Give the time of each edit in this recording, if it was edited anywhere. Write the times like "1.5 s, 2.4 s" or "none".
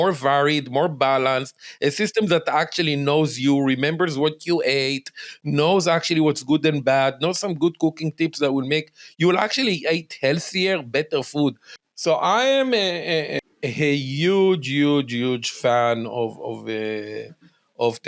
11.7 s, 13.3 s